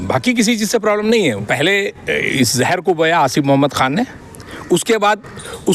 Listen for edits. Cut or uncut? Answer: cut